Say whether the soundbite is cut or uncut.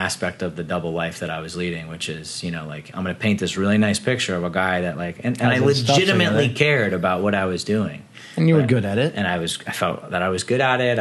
uncut